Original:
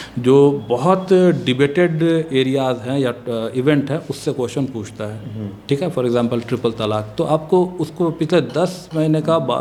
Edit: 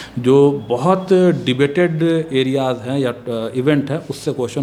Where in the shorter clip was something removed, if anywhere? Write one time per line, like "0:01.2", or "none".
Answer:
none